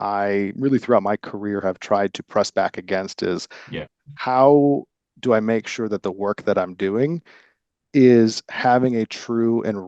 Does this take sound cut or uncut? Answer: uncut